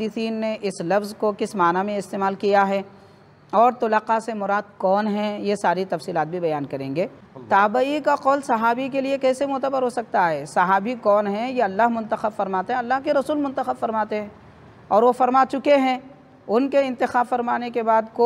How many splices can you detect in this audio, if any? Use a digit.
1